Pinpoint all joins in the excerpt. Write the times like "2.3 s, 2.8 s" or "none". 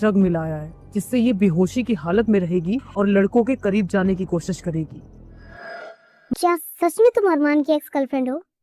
6.3 s